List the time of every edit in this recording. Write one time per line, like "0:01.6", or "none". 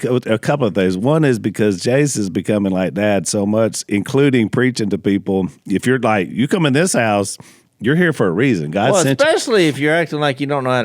none